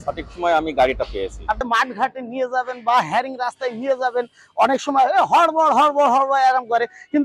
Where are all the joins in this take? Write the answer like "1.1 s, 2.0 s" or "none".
1.7 s